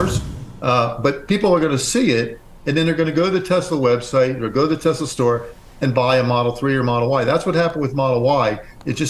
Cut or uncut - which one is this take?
cut